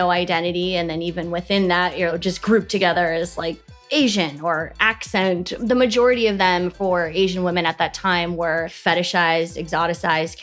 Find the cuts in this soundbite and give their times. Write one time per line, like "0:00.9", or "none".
none